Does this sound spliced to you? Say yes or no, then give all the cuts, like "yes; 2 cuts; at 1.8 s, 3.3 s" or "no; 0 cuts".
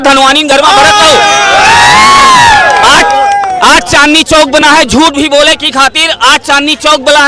no; 0 cuts